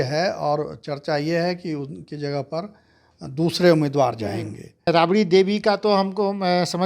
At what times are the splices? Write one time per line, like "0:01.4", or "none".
0:04.9